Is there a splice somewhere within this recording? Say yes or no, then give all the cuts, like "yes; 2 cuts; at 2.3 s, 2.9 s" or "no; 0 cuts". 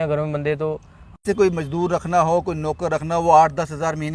yes; 1 cut; at 1.2 s